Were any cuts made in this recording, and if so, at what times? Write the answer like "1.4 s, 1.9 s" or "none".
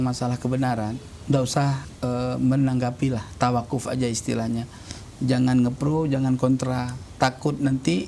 1.1 s, 1.9 s